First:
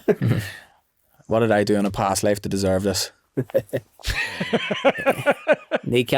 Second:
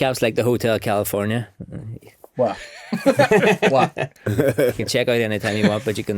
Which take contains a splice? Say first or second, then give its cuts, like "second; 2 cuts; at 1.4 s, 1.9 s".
second; 1 cut; at 4.2 s